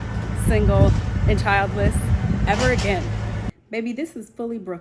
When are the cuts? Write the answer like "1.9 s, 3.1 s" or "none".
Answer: 3.5 s

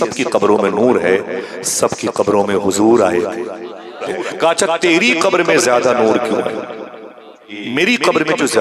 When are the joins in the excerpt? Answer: 4.1 s, 7.6 s

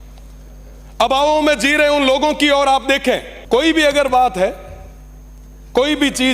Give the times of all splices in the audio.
3.3 s

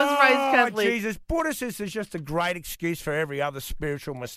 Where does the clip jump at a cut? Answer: none

